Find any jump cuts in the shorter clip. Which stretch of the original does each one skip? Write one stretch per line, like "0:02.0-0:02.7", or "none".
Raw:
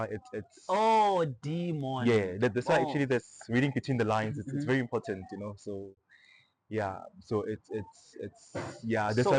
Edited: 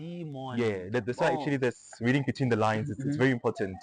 none